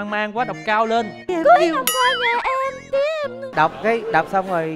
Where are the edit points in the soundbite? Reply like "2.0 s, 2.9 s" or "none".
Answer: 1.3 s, 3.5 s